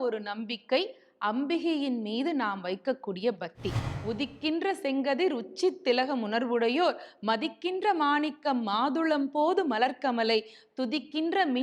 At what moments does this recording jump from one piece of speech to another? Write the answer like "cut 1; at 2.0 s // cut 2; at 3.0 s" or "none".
cut 1; at 3.9 s